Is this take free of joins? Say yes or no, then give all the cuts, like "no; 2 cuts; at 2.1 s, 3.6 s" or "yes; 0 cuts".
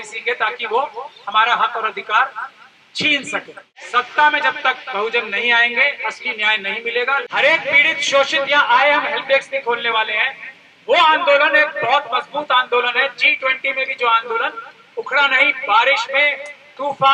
no; 2 cuts; at 3.7 s, 7.2 s